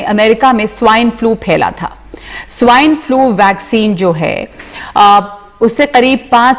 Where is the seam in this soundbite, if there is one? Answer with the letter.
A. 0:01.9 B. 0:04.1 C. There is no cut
C